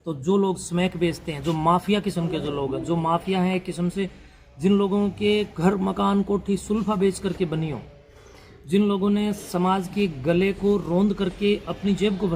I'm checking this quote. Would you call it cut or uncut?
uncut